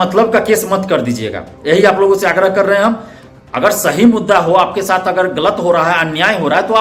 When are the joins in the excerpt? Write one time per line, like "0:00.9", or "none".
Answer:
none